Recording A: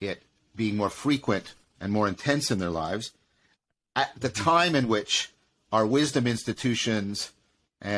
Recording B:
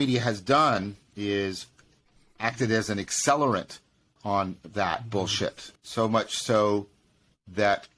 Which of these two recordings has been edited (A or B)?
B